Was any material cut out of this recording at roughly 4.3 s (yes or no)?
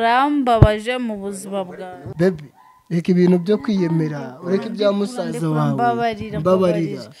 no